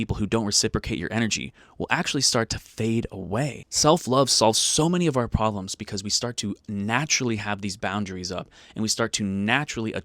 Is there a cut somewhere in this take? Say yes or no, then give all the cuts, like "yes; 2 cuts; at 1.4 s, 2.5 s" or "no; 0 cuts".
yes; 1 cut; at 3.6 s